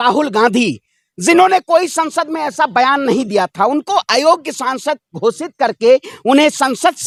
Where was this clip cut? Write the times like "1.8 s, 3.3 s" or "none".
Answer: none